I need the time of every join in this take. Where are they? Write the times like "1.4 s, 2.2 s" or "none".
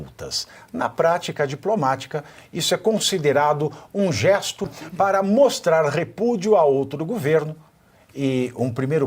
4.8 s